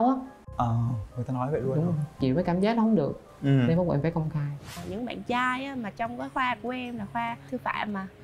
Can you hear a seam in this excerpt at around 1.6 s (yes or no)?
no